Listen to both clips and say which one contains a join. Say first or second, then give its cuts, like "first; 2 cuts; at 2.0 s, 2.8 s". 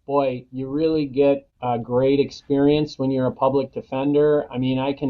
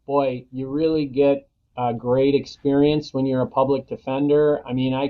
first; 1 cut; at 1.5 s